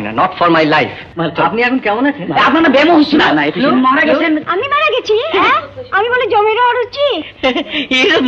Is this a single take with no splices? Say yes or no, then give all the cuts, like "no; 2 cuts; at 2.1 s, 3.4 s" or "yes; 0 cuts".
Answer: no; 1 cut; at 1.0 s